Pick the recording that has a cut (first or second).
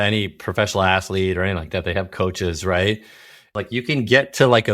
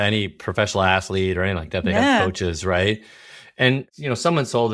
first